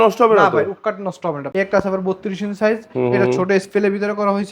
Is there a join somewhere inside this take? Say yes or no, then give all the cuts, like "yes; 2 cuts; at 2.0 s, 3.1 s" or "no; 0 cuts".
yes; 1 cut; at 1.4 s